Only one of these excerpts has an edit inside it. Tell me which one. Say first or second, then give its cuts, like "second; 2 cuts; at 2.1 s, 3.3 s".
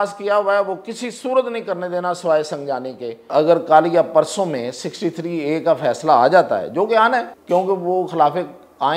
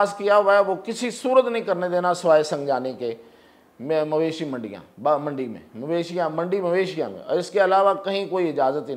first; 2 cuts; at 3.3 s, 7.3 s